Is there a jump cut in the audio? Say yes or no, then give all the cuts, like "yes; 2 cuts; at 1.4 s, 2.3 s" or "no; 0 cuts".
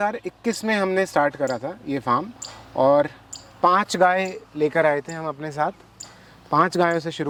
no; 0 cuts